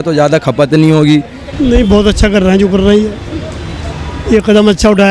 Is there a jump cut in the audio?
yes; 1 cut; at 1.4 s

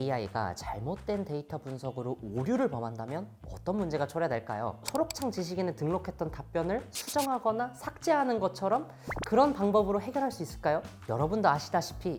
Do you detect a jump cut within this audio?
no; 0 cuts

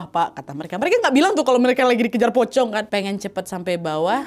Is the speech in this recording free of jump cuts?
no; 1 cut; at 2.9 s

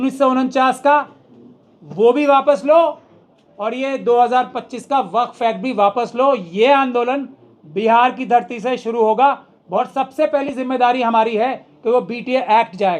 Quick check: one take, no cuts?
no; 1 cut; at 9.8 s

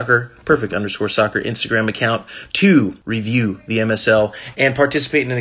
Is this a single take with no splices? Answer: no; 1 cut; at 3.0 s

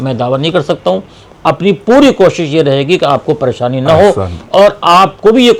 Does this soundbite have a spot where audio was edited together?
no; 0 cuts

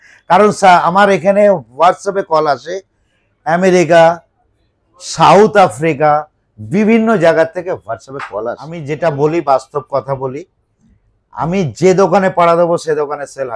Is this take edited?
yes; 1 cut; at 8.7 s

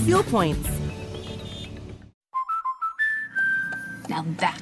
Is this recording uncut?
no; 1 cut; at 2.1 s

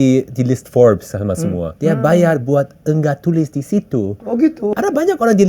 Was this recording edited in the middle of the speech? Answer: yes; 2 cuts; at 1.7 s, 4.7 s

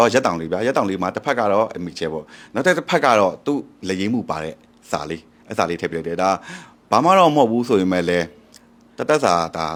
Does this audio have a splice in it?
no; 0 cuts

